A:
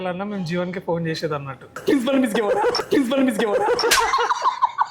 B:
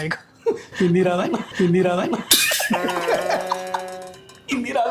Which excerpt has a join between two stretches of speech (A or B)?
A